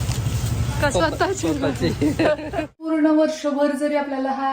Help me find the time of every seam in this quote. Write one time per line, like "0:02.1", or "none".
0:02.7